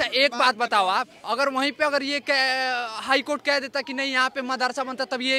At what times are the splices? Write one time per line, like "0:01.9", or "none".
none